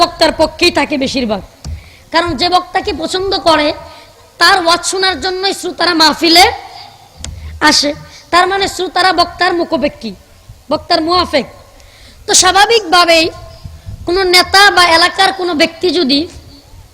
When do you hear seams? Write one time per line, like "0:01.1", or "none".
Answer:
none